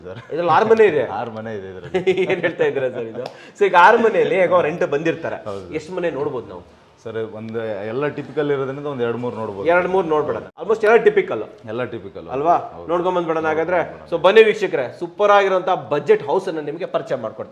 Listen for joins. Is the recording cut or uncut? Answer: uncut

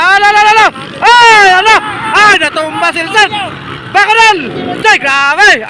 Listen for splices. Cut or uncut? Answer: uncut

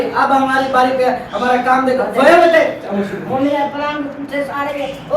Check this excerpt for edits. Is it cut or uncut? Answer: cut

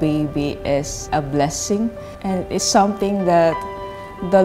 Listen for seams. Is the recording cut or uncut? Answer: cut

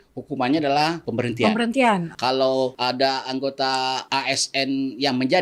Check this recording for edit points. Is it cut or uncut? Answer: cut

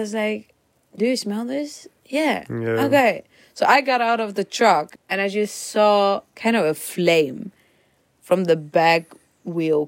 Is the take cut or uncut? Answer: cut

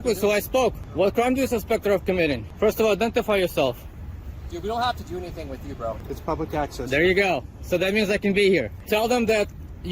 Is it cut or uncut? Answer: cut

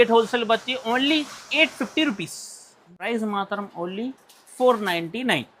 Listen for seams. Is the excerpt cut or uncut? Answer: cut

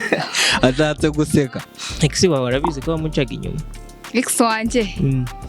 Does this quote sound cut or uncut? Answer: cut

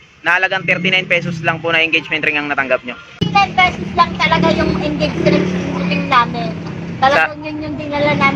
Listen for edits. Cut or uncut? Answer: cut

